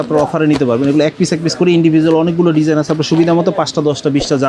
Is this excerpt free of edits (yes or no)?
yes